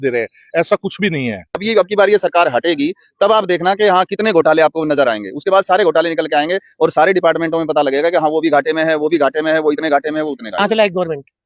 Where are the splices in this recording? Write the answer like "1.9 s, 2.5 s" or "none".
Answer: 1.6 s, 10.5 s